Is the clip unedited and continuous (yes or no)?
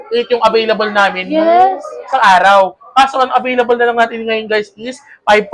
yes